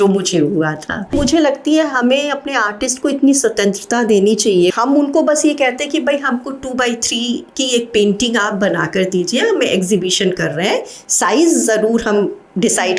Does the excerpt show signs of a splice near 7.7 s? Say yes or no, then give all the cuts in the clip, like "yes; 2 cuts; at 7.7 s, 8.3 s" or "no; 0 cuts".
no; 2 cuts; at 1.2 s, 4.7 s